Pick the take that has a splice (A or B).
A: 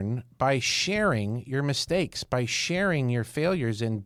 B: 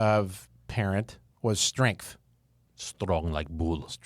B